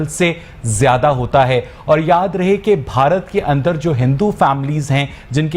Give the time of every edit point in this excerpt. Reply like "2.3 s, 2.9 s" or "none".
none